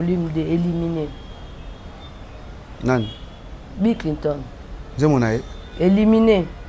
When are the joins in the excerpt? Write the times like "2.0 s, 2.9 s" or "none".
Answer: none